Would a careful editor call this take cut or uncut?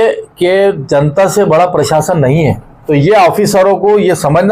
cut